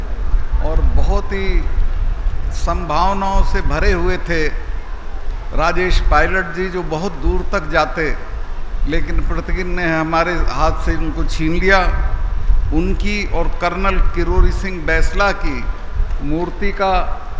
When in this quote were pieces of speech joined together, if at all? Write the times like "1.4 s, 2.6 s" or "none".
none